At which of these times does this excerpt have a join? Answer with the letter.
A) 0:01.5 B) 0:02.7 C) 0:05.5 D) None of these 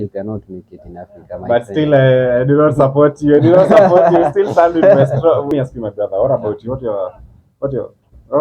C